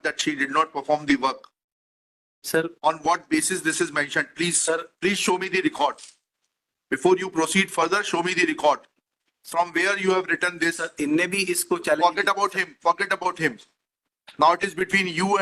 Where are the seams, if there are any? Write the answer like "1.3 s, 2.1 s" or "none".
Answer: none